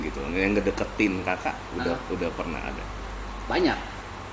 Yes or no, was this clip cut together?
no